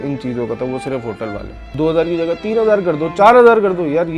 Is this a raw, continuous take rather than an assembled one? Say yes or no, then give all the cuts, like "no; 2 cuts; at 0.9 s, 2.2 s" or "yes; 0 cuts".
no; 1 cut; at 1.7 s